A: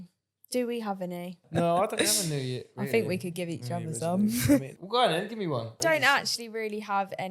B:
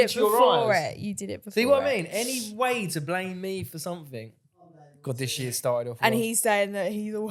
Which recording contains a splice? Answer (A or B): A